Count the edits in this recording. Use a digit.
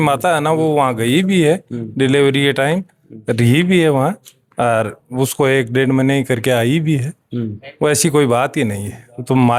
0